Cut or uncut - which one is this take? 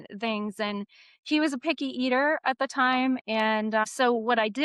uncut